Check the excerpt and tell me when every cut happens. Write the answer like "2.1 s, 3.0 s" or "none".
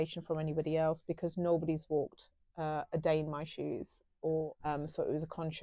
4.5 s